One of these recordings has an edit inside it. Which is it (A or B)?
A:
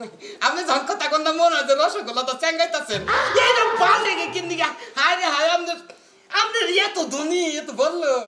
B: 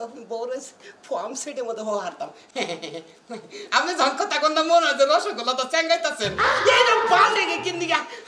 B